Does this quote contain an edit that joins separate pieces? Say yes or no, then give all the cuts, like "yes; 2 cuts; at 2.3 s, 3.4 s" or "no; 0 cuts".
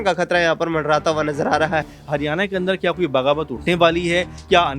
yes; 1 cut; at 2.0 s